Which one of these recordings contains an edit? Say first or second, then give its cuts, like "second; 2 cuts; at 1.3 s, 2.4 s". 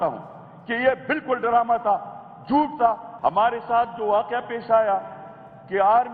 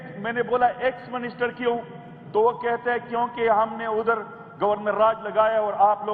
first; 1 cut; at 3.1 s